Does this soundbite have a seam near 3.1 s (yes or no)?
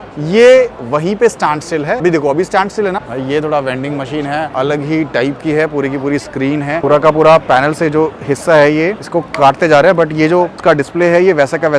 yes